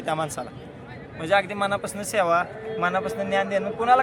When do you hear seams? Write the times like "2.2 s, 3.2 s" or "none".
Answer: none